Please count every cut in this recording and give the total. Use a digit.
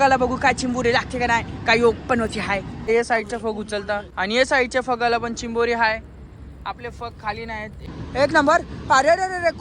3